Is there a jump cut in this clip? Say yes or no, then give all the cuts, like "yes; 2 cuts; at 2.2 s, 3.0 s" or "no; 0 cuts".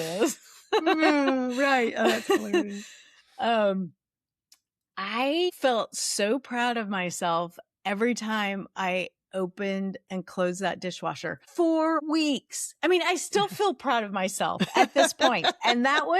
yes; 3 cuts; at 5.6 s, 11.4 s, 12.0 s